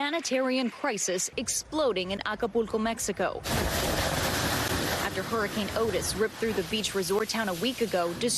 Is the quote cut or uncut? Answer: cut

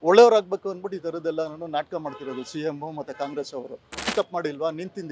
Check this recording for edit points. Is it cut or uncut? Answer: cut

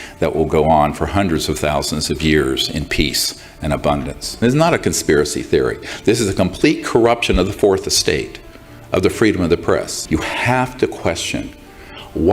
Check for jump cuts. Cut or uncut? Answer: cut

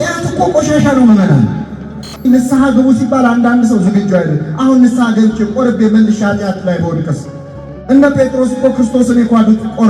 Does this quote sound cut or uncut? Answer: cut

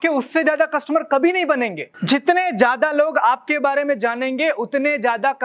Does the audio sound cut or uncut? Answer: cut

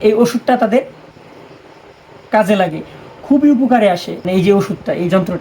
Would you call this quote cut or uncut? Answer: cut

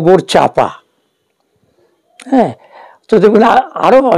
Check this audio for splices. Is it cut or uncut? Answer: uncut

